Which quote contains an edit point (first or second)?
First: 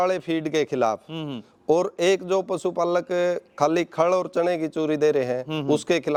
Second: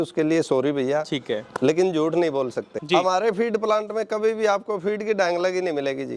second